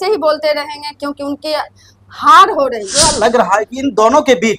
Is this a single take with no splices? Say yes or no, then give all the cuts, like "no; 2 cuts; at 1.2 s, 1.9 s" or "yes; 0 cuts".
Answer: no; 1 cut; at 3.1 s